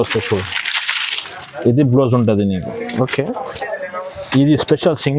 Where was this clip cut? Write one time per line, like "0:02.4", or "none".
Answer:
none